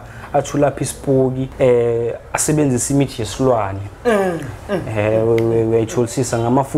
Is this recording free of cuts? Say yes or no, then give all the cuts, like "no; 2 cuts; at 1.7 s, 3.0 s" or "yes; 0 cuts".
no; 1 cut; at 1.4 s